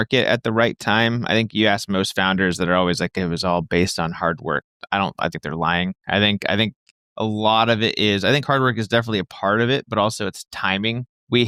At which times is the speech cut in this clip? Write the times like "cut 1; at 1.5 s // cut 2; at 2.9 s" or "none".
none